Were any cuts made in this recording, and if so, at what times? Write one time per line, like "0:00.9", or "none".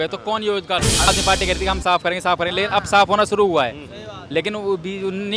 0:01.1